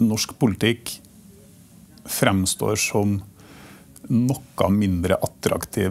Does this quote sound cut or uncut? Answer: uncut